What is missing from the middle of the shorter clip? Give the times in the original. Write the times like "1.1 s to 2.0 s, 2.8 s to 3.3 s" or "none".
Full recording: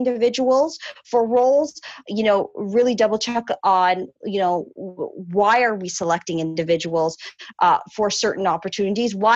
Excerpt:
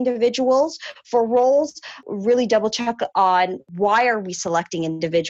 2.0 s to 2.5 s, 4.1 s to 5.2 s